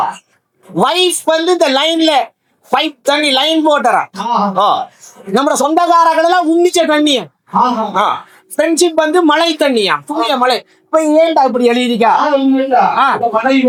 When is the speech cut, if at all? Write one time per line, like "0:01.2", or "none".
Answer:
none